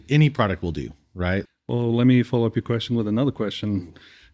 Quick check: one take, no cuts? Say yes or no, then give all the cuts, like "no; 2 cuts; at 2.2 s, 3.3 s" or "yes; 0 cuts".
no; 1 cut; at 1.5 s